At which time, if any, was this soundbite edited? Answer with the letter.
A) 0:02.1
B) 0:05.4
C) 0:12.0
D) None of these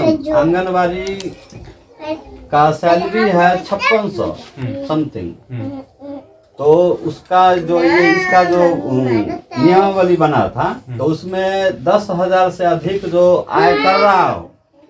D